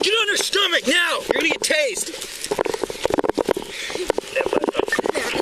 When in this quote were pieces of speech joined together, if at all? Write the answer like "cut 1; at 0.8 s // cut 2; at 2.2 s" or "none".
none